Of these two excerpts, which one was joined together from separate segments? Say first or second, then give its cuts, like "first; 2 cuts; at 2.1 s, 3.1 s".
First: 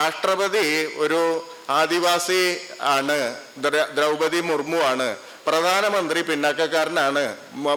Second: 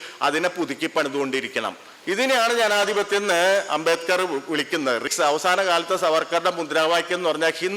second; 1 cut; at 5.1 s